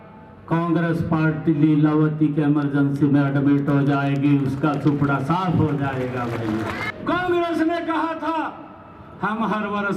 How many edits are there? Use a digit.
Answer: 1